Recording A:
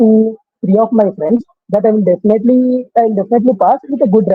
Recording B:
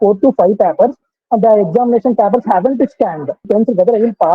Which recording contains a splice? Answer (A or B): B